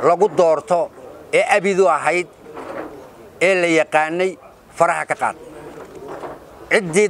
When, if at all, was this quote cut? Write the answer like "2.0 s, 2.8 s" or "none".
none